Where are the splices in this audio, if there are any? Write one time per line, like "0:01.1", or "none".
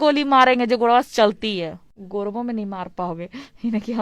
0:01.9